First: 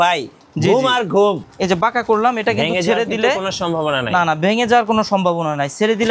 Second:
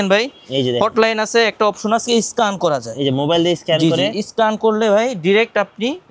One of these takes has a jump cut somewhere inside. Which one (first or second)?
first